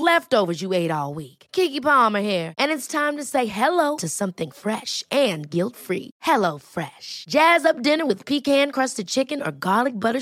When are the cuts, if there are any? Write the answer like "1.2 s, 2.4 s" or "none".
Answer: none

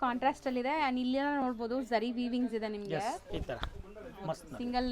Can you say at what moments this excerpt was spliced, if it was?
3.2 s

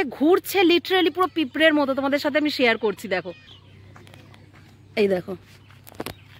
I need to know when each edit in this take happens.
none

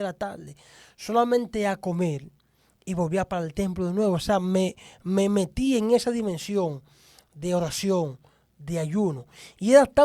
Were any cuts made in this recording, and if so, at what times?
none

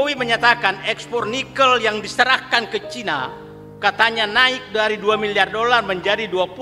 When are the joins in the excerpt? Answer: none

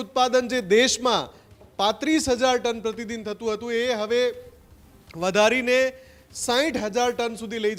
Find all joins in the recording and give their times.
none

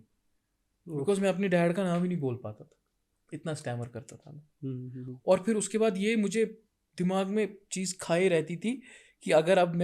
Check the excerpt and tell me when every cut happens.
none

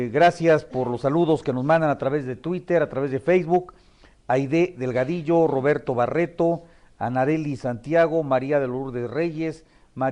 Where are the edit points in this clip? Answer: 5.6 s

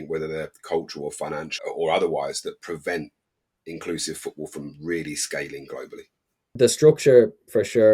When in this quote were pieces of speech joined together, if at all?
1.6 s, 6.5 s

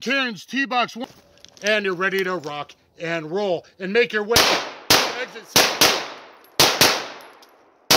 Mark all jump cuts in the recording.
1.0 s

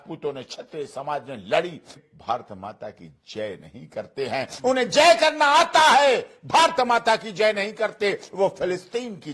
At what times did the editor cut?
1.9 s

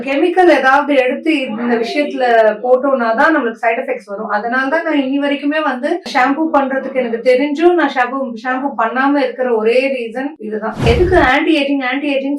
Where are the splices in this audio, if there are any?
6.1 s, 10.9 s

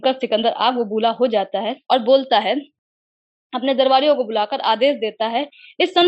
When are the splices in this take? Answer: none

